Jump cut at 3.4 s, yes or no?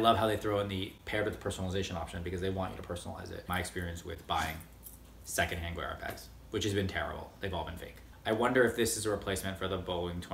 yes